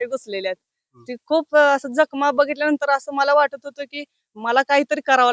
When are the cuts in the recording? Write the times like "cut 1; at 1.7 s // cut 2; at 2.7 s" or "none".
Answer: none

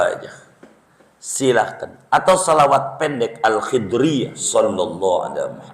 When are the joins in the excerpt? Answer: cut 1; at 4.4 s

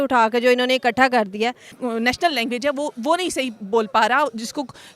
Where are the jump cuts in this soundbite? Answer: cut 1; at 1.7 s

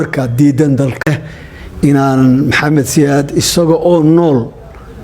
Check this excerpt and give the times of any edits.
cut 1; at 1.1 s

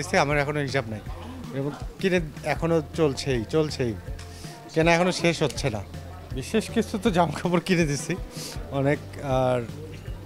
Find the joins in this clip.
none

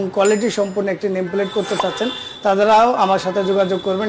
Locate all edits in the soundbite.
none

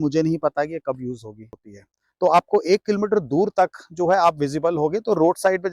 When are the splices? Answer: cut 1; at 1.6 s

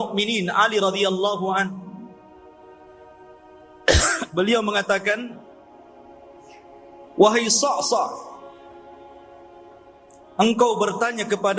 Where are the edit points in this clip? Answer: none

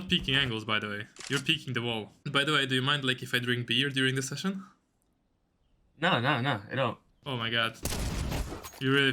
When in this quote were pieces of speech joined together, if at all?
cut 1; at 2.2 s // cut 2; at 7.1 s

